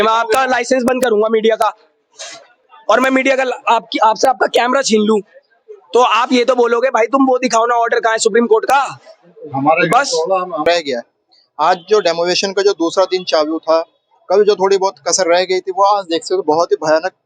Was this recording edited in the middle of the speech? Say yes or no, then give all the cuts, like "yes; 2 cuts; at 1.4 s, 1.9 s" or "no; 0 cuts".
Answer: yes; 1 cut; at 10.6 s